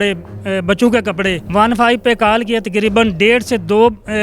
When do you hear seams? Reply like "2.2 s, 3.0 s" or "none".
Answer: 1.4 s